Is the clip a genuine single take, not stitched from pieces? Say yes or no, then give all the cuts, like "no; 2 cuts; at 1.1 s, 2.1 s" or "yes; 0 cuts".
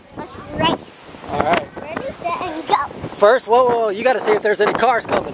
yes; 0 cuts